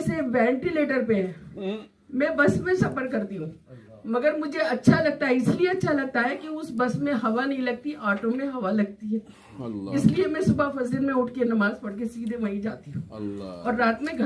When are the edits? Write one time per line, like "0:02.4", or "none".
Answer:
none